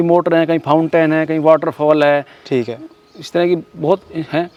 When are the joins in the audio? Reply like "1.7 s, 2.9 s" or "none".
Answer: none